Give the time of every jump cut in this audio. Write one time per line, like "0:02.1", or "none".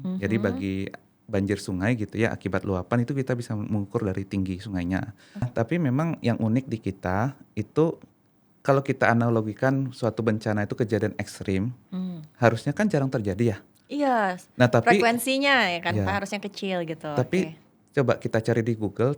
0:05.5